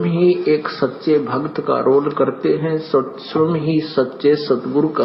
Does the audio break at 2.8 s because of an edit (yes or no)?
no